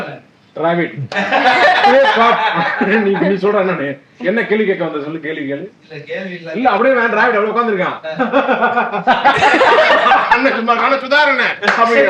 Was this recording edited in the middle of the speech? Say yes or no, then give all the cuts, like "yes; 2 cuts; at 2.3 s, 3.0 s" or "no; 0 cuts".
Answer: no; 0 cuts